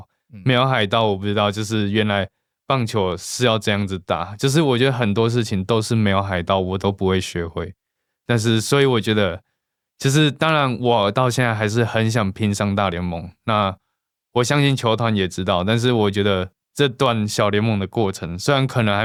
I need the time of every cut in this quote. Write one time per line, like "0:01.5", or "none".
none